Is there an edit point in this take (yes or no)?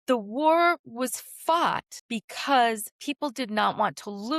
yes